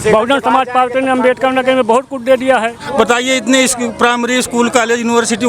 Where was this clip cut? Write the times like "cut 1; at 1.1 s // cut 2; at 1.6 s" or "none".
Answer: cut 1; at 2.8 s